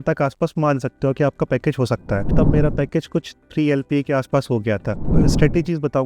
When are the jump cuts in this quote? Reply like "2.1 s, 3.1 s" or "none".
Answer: 2.3 s, 5.0 s